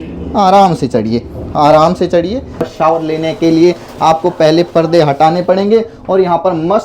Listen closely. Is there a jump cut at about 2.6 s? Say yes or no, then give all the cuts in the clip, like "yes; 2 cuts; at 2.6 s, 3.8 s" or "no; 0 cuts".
yes; 1 cut; at 2.6 s